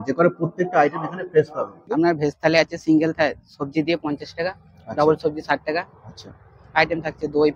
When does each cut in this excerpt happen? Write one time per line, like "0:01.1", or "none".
0:01.8